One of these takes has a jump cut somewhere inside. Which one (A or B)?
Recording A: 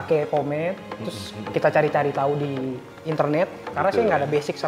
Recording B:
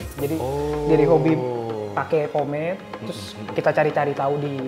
A